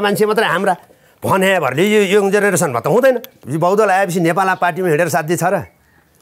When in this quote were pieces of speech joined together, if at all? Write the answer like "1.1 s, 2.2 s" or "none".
3.4 s